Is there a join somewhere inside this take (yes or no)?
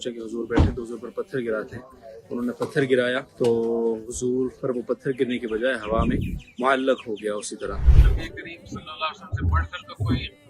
yes